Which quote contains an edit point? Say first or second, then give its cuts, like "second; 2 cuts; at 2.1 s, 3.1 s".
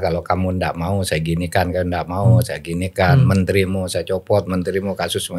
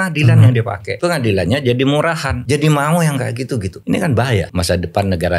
second; 4 cuts; at 0.9 s, 2.3 s, 3.7 s, 4.5 s